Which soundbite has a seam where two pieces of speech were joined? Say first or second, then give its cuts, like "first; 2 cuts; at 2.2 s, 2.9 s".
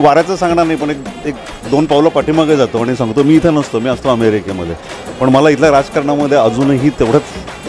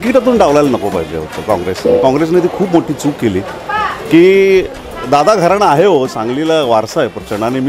second; 1 cut; at 3.6 s